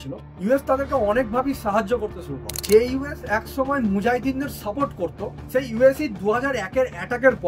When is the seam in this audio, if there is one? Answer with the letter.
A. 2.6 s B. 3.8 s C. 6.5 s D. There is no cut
A